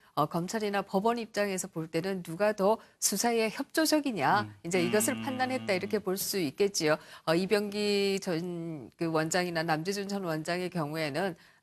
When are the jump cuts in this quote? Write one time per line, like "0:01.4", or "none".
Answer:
0:06.5